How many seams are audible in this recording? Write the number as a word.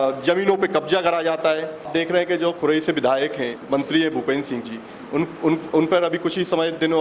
one